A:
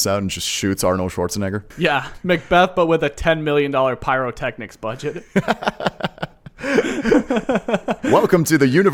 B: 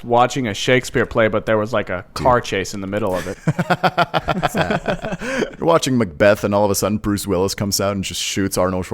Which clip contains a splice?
B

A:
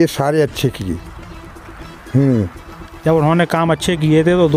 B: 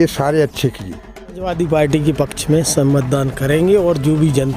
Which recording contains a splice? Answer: B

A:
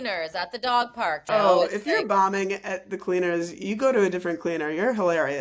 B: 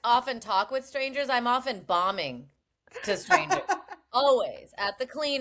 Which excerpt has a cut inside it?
A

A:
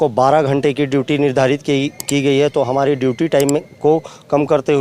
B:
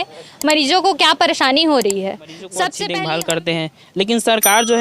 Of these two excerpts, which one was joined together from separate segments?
B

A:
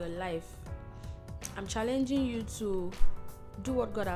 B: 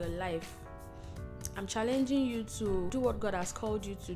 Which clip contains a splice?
B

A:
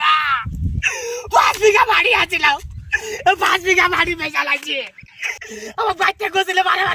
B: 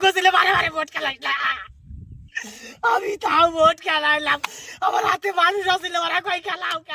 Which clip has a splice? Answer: A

